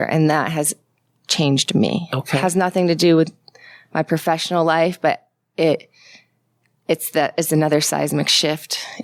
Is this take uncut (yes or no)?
yes